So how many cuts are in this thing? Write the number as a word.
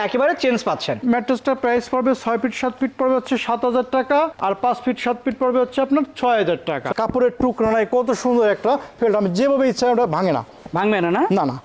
two